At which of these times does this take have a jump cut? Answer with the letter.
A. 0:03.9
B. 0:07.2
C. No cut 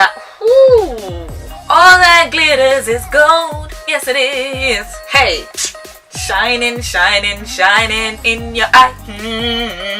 C